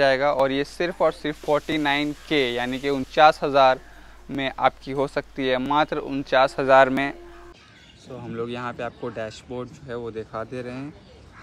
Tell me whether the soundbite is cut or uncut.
uncut